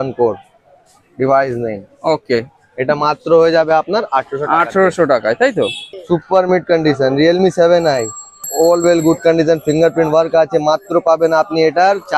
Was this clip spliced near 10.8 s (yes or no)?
no